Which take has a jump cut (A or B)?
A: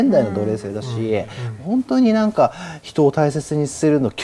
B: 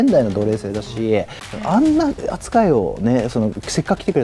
B